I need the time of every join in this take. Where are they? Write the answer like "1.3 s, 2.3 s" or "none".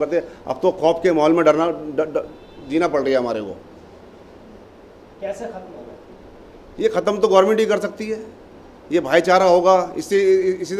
none